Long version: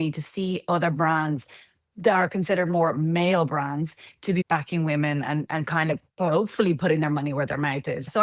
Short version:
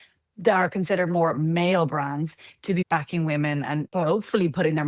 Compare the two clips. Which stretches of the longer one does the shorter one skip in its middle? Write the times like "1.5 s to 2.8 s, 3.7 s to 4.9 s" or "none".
5.5 s to 6.1 s